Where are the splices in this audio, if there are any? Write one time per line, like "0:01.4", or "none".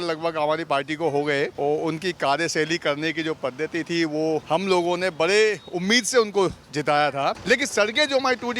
0:01.5
0:04.4
0:07.4